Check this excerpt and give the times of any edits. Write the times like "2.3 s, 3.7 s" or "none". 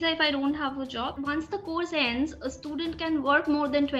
1.1 s